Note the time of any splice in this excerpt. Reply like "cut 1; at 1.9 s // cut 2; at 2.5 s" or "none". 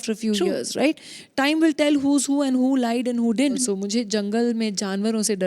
cut 1; at 3.6 s

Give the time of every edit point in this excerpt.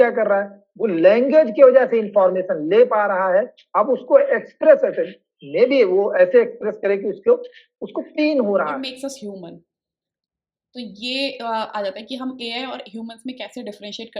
cut 1; at 8.8 s

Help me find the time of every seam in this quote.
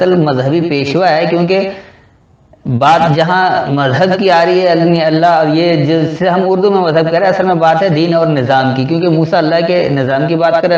none

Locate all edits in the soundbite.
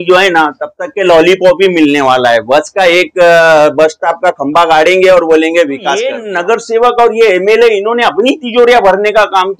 cut 1; at 6.2 s

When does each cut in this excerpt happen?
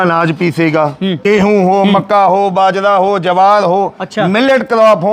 cut 1; at 1.1 s

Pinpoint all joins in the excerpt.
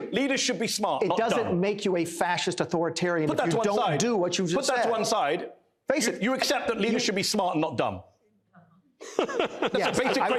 none

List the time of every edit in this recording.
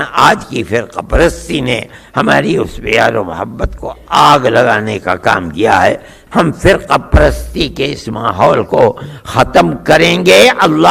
cut 1; at 6.1 s

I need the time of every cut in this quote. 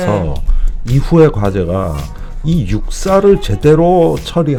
none

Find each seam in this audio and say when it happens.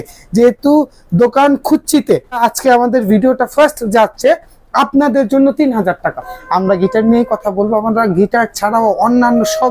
cut 1; at 2.4 s // cut 2; at 6.3 s

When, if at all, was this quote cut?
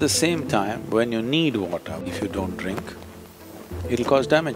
cut 1; at 2.0 s

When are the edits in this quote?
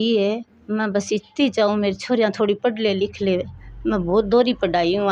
none

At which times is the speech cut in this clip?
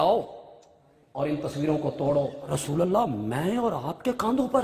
cut 1; at 2.6 s

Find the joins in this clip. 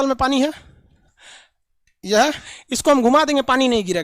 cut 1; at 2.5 s

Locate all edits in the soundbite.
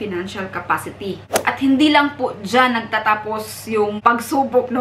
cut 1; at 1.3 s // cut 2; at 4.0 s

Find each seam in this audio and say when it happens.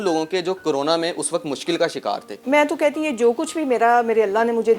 cut 1; at 2.3 s

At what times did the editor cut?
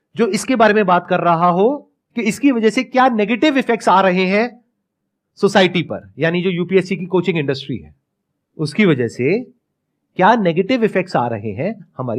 none

